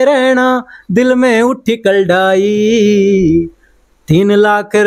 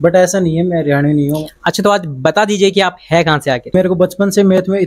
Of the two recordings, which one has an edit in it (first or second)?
second